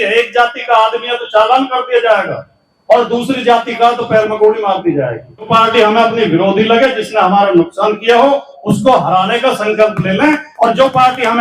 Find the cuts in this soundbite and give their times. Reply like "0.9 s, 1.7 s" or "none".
5.5 s